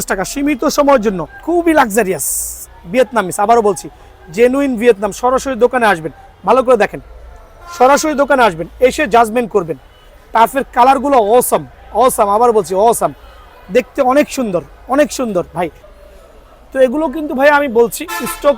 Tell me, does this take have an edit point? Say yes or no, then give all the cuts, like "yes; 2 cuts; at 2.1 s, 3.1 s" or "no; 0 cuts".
yes; 2 cuts; at 1.3 s, 15.8 s